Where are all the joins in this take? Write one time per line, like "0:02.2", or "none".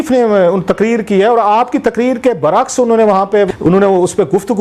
0:03.5